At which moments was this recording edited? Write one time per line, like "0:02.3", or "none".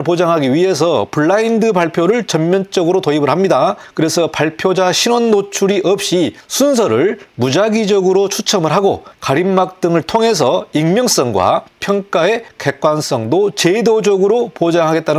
none

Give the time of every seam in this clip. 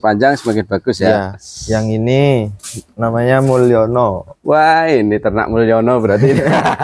0:01.5

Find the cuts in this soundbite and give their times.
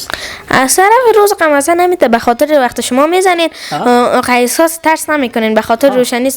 none

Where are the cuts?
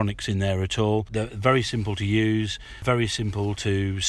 0:01.1
0:02.8

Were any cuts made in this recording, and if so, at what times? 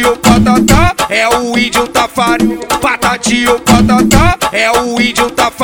none

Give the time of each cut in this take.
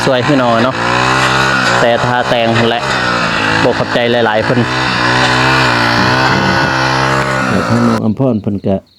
0:07.6

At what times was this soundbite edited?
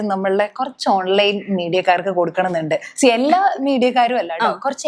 none

